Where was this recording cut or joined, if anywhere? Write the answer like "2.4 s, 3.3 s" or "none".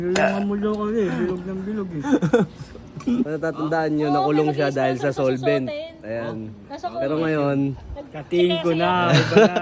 3.3 s